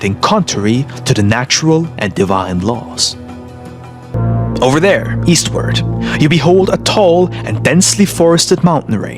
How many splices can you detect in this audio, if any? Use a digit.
1